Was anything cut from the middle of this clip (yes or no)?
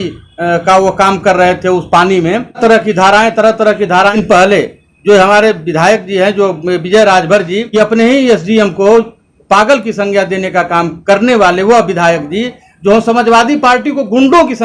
yes